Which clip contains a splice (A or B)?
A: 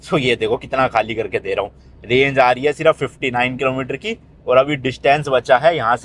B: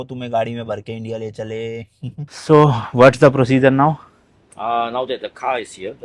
B